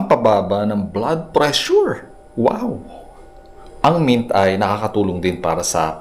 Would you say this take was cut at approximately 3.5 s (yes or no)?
yes